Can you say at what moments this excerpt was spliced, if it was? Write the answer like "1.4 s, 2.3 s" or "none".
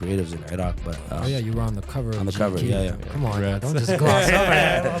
none